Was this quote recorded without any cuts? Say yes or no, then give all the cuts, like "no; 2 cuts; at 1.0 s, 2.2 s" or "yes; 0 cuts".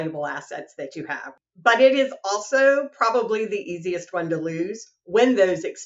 no; 1 cut; at 1.4 s